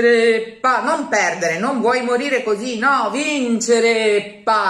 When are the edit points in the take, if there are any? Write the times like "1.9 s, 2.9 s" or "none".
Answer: none